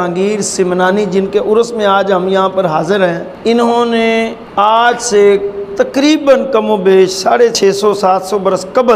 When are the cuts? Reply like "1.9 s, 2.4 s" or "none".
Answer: 3.3 s, 4.4 s